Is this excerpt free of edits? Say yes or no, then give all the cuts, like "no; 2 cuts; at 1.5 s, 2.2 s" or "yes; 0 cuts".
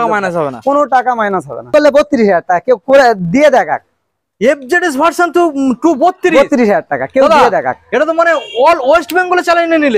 no; 1 cut; at 1.7 s